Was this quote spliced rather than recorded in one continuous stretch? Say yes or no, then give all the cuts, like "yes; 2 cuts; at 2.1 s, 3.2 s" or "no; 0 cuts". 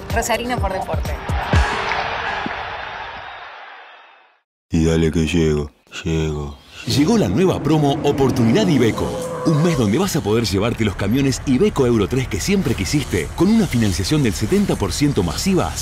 yes; 1 cut; at 4.7 s